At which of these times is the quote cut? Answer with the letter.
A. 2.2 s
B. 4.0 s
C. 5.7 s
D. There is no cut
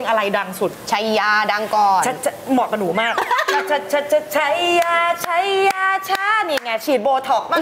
D